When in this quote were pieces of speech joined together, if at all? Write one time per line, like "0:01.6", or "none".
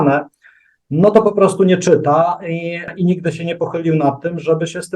0:02.9

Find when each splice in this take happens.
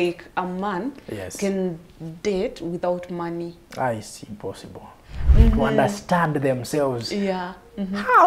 0:05.2

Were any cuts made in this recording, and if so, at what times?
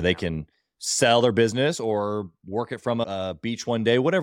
0:03.0

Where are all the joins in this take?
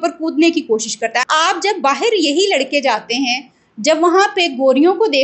0:01.2

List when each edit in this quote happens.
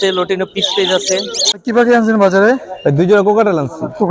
0:01.4

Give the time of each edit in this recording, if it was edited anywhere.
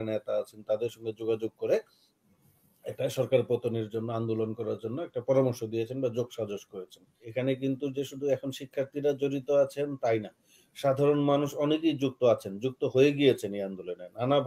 0:07.2

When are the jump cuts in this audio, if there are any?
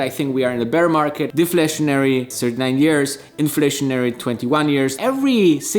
0:01.3
0:04.9

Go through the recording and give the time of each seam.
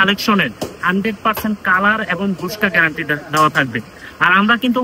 none

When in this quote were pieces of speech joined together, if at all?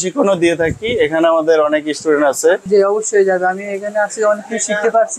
0:02.6

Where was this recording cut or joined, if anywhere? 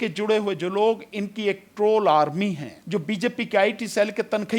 0:02.7

